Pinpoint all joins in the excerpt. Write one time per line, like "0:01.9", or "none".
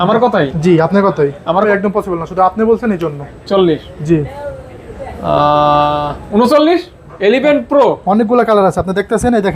0:01.6
0:07.0